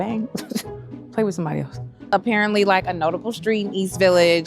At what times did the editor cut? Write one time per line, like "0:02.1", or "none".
0:01.9